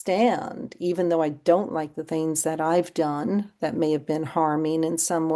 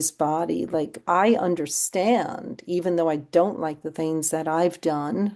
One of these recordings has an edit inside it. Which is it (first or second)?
second